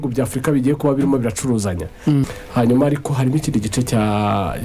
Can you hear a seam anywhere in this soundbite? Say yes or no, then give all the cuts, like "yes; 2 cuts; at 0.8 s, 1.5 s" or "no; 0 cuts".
yes; 1 cut; at 2.3 s